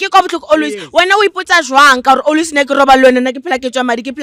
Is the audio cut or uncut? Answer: uncut